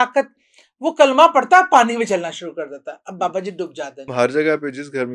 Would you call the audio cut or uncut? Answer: cut